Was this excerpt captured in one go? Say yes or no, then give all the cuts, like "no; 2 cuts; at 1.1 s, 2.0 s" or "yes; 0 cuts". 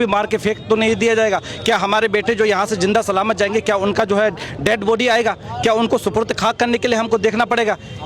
yes; 0 cuts